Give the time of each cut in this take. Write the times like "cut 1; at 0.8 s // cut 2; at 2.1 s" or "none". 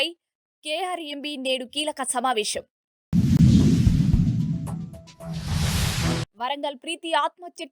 cut 1; at 3.4 s // cut 2; at 6.2 s